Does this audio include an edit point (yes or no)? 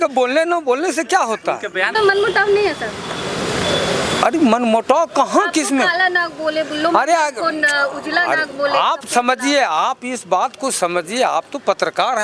yes